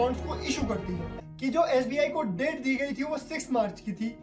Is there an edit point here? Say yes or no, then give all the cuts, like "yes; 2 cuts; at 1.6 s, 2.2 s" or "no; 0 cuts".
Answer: yes; 1 cut; at 1.1 s